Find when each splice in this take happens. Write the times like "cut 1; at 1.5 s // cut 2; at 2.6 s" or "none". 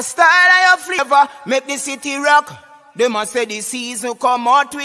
cut 1; at 1.0 s